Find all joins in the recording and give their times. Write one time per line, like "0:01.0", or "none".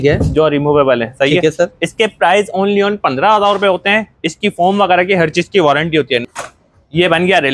0:06.3

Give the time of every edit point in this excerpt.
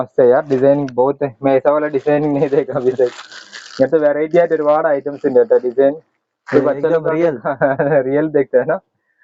none

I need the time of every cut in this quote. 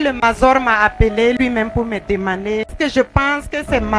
0:02.7

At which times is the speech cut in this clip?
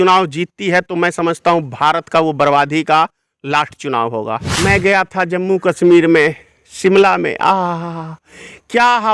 0:04.4

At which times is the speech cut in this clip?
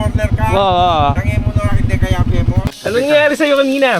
0:02.6

